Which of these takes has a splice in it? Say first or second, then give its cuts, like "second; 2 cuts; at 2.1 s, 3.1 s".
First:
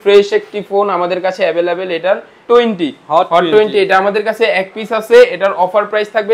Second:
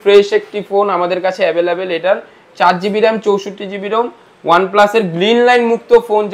first; 1 cut; at 2.4 s